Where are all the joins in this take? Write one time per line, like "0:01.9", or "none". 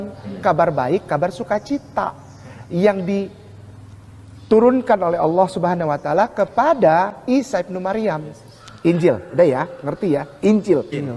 0:09.8